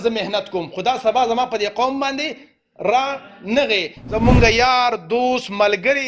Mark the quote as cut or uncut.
cut